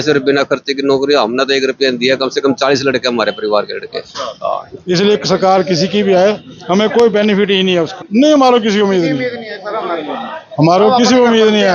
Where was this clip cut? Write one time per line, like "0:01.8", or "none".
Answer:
0:04.7
0:08.0